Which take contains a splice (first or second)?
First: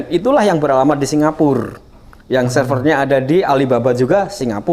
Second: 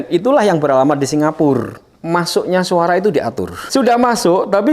second